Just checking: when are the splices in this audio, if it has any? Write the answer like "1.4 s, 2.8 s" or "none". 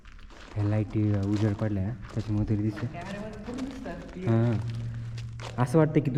none